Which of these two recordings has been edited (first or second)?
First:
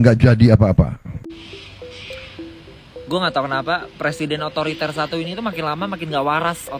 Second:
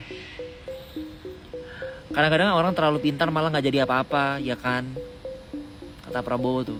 first